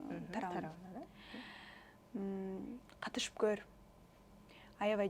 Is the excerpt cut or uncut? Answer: uncut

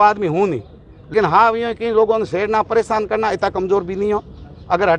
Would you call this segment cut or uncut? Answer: cut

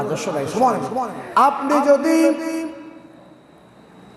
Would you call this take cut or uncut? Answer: cut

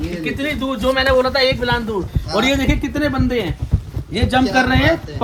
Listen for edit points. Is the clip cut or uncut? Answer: uncut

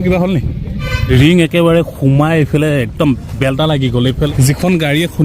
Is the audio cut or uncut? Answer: cut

